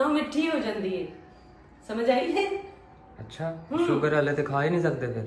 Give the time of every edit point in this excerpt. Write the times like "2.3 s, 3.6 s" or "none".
none